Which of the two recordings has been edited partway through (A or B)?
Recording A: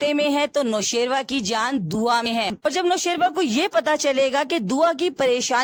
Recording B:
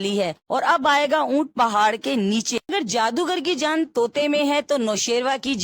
B